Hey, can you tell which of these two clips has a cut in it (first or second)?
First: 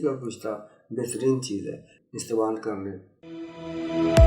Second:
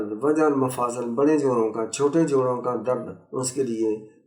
first